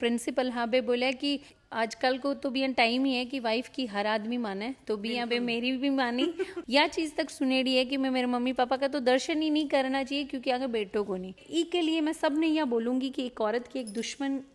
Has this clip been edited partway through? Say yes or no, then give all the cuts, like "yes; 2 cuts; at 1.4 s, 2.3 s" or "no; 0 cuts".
yes; 3 cuts; at 1.4 s, 6.6 s, 11.4 s